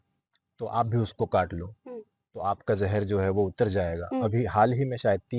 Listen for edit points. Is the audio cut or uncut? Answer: uncut